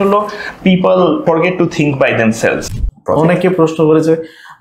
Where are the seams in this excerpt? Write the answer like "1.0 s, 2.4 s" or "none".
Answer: 1.2 s, 2.6 s